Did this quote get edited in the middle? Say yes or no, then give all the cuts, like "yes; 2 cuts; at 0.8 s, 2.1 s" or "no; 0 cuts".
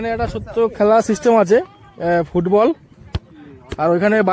no; 0 cuts